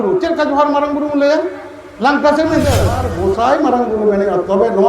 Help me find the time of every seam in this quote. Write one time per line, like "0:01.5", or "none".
0:03.1